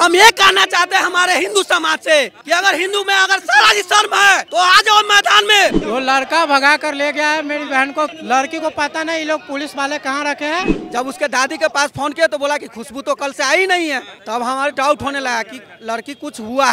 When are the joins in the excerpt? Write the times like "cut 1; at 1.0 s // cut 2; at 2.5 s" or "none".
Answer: cut 1; at 5.8 s // cut 2; at 8.2 s // cut 3; at 10.7 s